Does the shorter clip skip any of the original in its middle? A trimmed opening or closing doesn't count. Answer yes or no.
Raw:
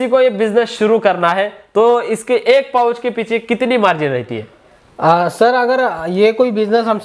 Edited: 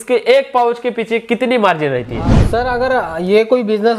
yes